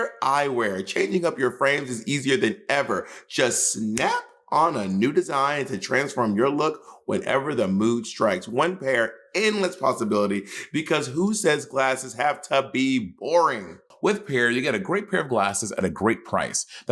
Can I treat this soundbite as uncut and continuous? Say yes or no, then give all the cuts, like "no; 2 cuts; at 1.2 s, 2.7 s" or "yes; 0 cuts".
no; 1 cut; at 13.9 s